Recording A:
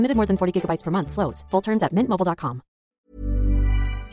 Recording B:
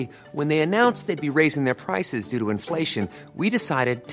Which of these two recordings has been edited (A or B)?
A